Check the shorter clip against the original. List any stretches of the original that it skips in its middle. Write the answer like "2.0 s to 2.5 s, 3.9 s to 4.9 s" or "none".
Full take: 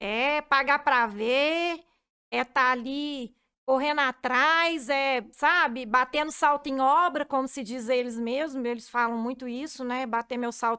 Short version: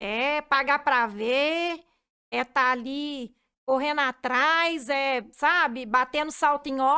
none